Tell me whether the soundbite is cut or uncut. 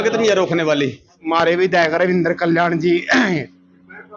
cut